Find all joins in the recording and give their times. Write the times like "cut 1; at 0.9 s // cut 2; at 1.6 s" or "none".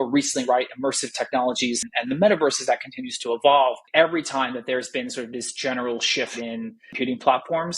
cut 1; at 1.9 s // cut 2; at 3.8 s // cut 3; at 6.8 s